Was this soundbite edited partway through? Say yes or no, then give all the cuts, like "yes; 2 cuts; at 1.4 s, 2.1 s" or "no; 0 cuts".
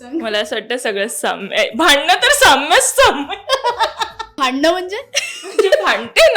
yes; 1 cut; at 4.3 s